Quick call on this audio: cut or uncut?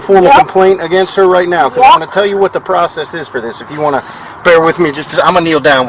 uncut